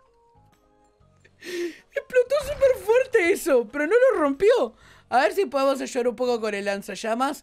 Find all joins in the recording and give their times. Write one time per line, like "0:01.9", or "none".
none